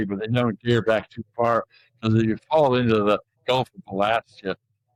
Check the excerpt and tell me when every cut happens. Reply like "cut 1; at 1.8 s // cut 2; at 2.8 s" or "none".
none